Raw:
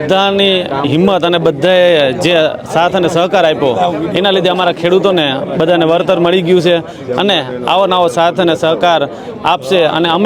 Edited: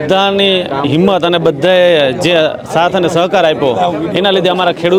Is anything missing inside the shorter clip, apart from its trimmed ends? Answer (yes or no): no